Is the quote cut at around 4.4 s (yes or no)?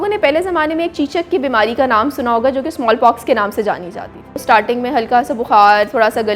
yes